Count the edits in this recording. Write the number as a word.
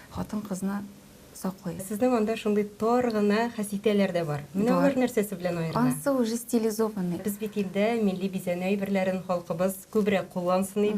two